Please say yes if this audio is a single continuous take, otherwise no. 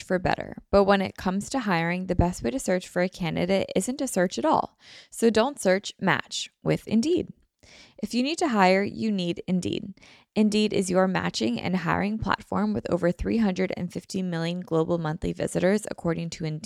yes